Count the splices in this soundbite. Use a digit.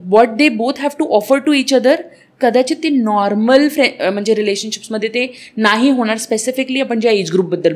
0